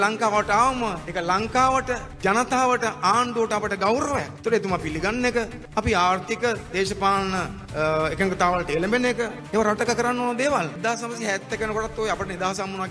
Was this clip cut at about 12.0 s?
no; 7 cuts; at 1.1 s, 2.1 s, 4.3 s, 5.6 s, 7.6 s, 9.4 s, 10.8 s

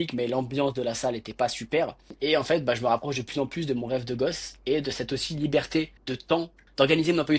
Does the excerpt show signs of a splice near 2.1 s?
yes; 2 cuts; at 2.1 s, 6.3 s

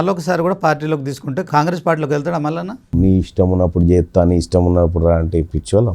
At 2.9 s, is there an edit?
yes; 2 cuts; at 1.5 s, 2.9 s

